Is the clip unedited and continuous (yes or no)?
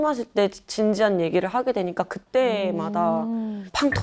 yes